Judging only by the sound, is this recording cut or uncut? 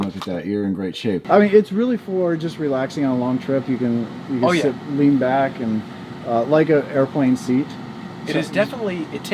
cut